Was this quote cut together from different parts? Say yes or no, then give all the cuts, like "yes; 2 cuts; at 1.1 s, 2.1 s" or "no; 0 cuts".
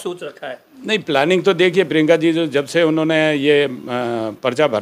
no; 0 cuts